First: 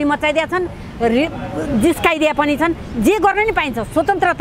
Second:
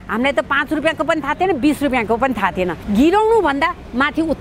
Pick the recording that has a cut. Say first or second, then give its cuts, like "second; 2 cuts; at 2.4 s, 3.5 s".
second; 1 cut; at 2.8 s